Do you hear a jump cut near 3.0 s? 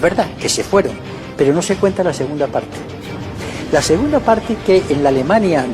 no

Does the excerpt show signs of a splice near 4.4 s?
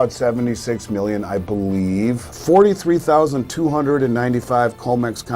no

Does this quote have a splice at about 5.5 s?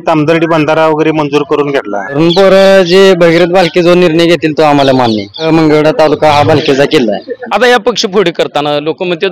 yes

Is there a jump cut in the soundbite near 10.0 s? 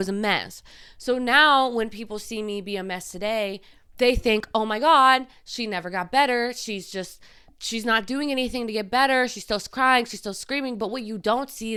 no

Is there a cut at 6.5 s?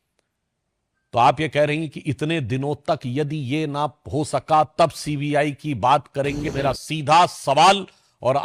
yes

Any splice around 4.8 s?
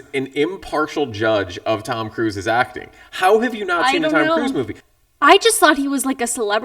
yes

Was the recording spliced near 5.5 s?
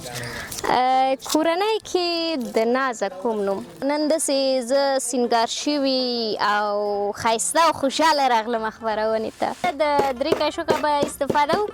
no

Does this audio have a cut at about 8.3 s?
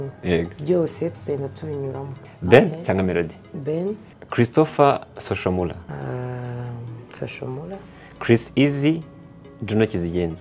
no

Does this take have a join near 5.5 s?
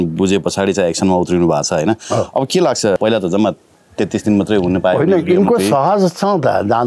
no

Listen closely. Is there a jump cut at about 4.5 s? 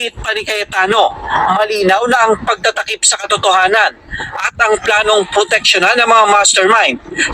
no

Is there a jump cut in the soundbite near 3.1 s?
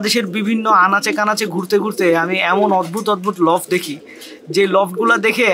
no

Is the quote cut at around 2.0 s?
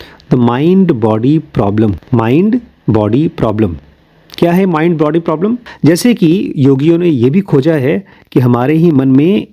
yes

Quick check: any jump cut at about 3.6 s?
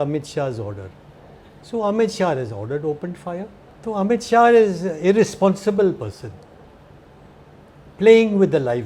yes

